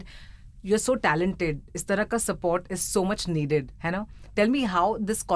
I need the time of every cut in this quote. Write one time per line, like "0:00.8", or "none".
none